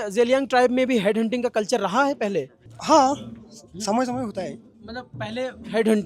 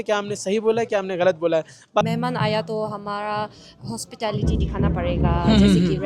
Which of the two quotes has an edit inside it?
second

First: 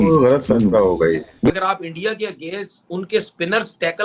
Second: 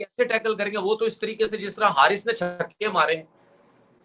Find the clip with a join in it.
first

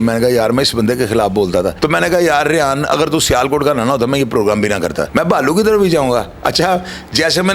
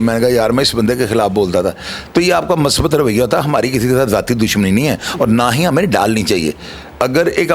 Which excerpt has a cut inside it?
first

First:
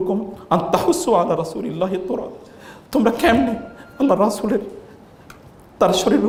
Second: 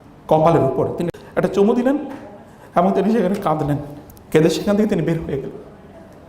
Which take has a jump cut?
second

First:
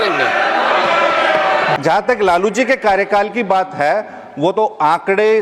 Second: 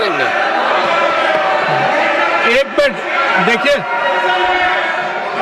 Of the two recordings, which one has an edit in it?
first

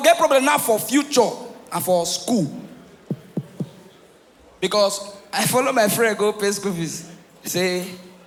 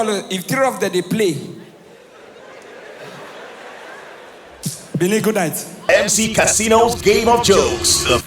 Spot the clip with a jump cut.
second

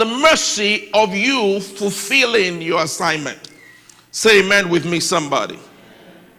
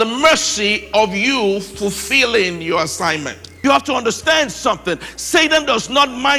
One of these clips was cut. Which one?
second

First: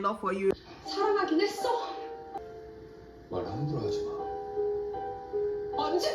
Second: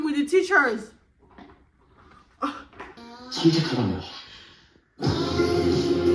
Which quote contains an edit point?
first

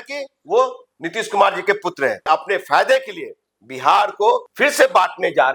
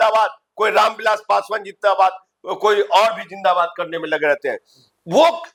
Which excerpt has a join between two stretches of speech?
first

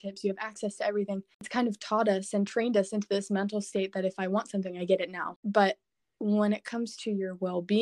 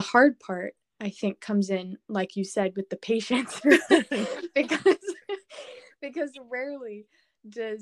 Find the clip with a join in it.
first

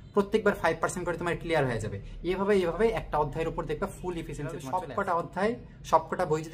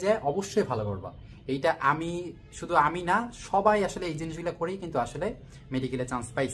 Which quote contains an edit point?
first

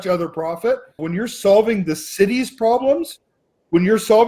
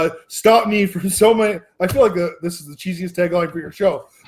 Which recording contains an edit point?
first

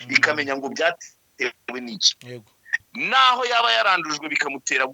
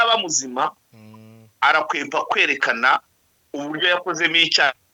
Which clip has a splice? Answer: first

